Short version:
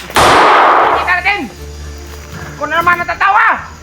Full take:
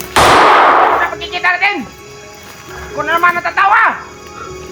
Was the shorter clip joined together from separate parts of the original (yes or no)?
yes